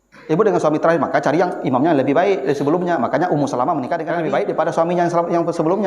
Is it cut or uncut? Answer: cut